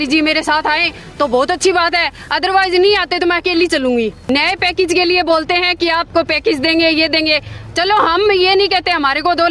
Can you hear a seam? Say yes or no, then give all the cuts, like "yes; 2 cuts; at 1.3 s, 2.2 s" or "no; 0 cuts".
yes; 1 cut; at 4.2 s